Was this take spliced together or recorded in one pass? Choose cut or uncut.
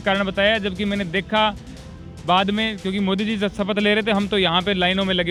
uncut